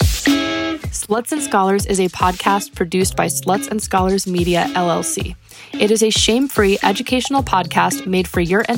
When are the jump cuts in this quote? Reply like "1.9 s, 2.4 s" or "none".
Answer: 0.9 s